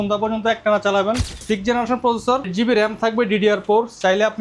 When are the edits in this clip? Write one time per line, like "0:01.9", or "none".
0:01.4
0:02.5